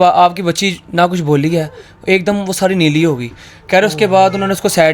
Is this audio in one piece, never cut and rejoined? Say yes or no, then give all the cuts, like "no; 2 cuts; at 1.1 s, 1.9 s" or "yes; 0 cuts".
yes; 0 cuts